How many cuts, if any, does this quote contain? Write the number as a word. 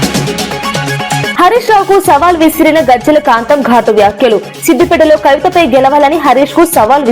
one